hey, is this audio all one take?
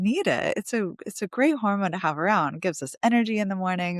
yes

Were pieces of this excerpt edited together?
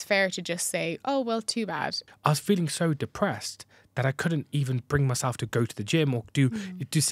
yes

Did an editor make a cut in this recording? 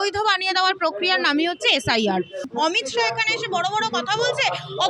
yes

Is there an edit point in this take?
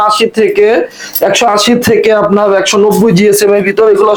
no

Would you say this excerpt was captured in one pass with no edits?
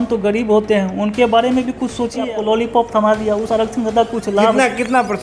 no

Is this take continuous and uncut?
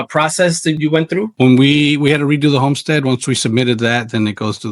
no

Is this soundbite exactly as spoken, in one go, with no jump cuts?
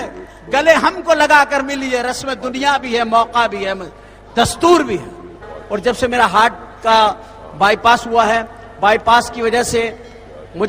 no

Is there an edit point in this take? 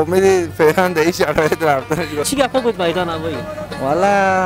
yes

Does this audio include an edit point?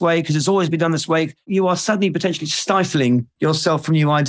yes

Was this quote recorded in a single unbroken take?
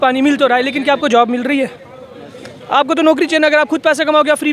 yes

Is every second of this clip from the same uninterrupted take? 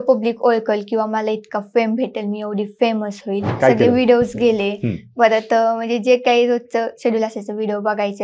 no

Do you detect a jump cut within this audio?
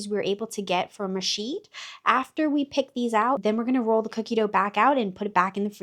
no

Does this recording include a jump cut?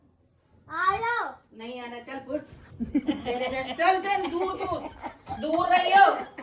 no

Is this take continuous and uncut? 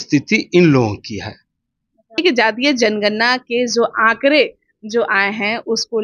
no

